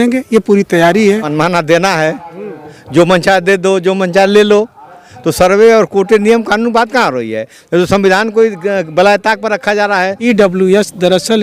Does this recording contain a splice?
yes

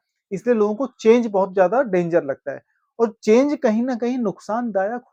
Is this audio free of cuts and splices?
yes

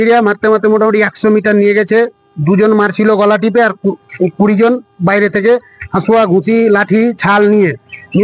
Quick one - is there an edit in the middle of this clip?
no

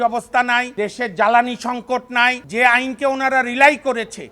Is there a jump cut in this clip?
yes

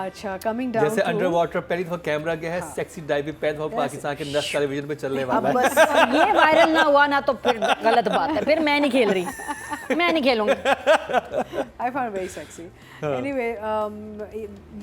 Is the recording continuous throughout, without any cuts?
yes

